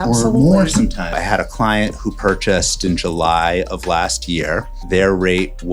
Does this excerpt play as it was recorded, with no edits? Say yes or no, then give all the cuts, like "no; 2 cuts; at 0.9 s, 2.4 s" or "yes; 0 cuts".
no; 3 cuts; at 1.1 s, 2.8 s, 4.7 s